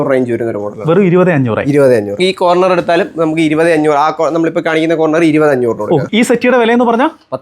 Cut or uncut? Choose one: cut